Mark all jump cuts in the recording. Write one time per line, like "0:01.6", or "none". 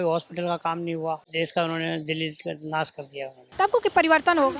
0:01.2
0:03.4